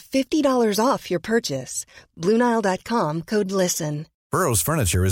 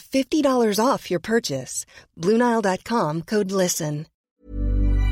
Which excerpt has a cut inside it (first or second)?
second